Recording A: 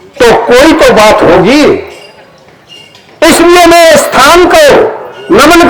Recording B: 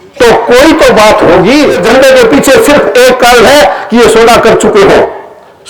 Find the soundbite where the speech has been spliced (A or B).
B